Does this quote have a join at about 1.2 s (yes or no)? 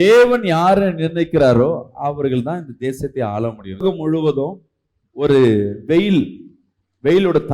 no